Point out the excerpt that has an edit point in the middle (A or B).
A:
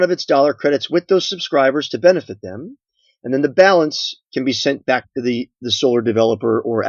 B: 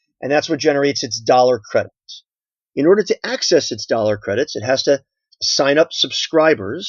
B